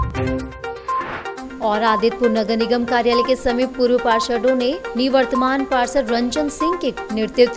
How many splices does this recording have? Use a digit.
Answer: 1